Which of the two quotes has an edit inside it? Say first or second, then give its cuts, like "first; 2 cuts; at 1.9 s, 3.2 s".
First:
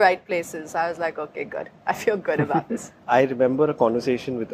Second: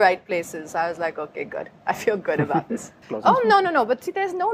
second; 1 cut; at 2.9 s